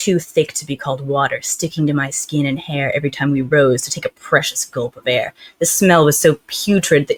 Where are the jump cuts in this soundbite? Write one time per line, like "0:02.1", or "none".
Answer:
none